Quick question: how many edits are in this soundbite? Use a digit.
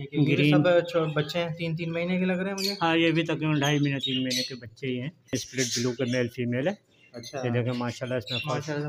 1